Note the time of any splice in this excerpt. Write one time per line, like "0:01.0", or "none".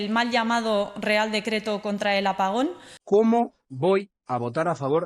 0:02.9